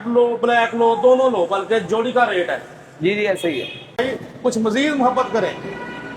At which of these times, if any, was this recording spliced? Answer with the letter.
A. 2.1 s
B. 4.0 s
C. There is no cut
B